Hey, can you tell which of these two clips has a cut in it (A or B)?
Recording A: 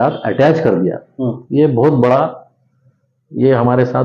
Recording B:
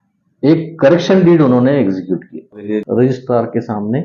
B